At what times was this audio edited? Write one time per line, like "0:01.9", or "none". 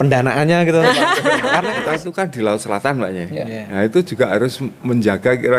0:01.8